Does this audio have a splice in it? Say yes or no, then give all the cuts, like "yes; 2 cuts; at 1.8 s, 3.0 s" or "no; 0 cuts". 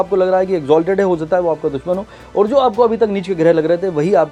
no; 0 cuts